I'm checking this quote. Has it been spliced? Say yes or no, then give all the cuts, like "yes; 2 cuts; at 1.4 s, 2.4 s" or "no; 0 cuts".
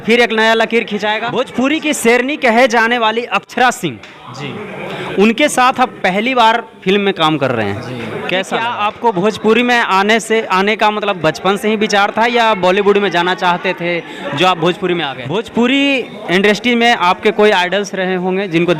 yes; 3 cuts; at 1.2 s, 8.6 s, 15.2 s